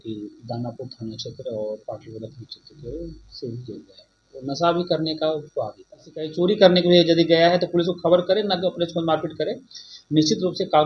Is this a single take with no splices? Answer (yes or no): no